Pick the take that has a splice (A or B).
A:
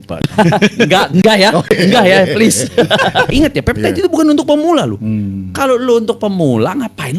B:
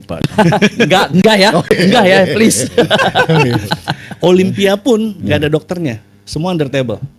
A